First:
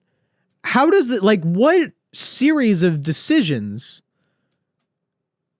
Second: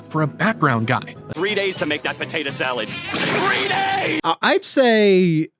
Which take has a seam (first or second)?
second